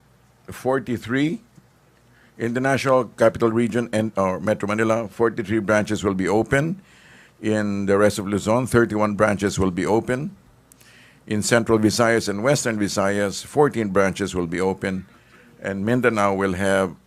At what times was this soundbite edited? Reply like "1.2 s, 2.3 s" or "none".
8.1 s